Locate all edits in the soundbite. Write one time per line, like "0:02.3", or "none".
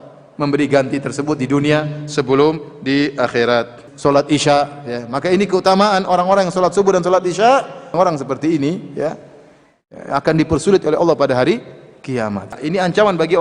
0:03.8
0:07.9
0:12.6